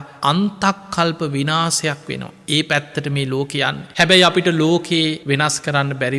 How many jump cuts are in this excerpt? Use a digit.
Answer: 2